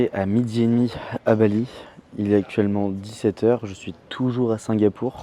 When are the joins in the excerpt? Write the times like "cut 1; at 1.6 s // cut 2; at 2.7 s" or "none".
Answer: none

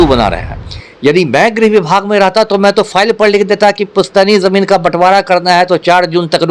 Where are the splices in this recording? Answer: none

